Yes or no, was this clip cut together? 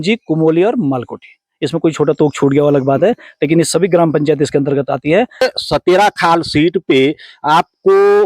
yes